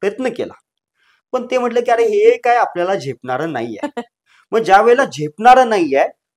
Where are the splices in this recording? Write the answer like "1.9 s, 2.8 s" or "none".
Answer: none